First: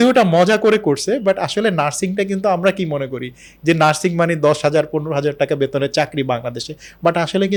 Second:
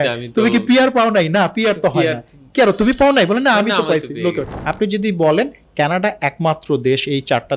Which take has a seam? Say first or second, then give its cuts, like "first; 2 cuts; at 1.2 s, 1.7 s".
second; 1 cut; at 4.5 s